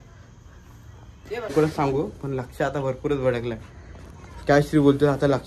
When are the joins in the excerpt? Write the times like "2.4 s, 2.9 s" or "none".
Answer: 1.5 s